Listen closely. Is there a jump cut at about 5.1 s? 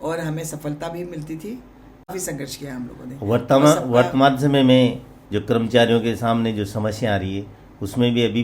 no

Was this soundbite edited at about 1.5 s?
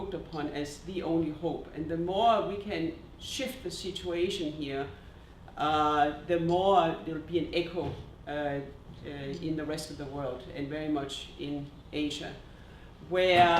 yes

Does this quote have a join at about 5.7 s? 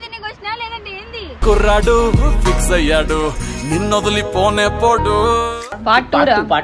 yes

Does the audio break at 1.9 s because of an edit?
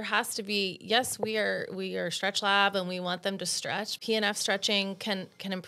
no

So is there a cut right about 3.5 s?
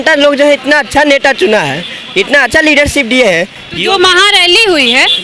no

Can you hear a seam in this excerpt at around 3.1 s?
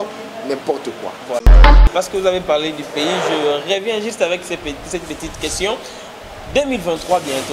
no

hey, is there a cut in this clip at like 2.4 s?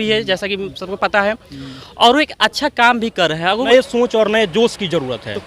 no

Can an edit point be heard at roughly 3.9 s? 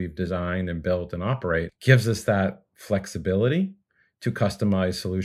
no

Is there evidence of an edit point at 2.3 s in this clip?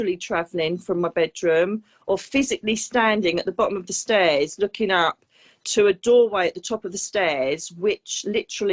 no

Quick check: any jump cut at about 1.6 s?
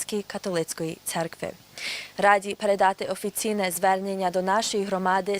yes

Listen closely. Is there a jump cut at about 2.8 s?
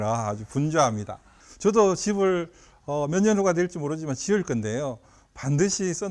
no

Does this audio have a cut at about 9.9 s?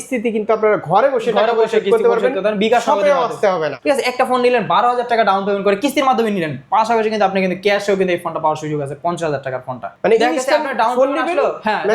yes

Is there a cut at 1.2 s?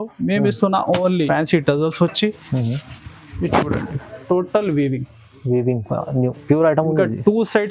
yes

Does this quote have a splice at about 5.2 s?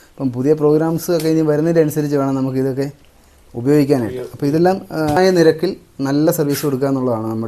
yes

